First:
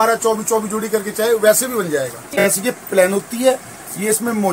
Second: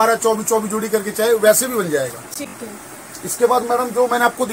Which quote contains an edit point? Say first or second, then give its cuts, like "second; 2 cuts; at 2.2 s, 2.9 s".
first; 1 cut; at 2.4 s